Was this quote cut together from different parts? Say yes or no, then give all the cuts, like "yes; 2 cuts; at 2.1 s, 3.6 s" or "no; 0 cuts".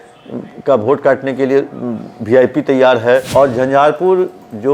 yes; 1 cut; at 3.3 s